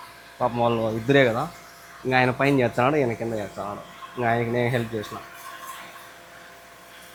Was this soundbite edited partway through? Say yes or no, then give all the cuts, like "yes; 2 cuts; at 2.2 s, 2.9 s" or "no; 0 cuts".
no; 0 cuts